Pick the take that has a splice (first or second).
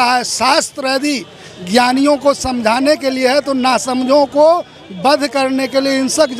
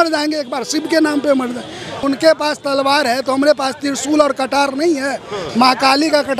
second